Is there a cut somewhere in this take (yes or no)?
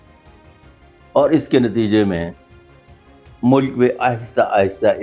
no